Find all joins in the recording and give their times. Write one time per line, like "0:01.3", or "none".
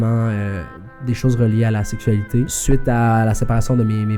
0:02.5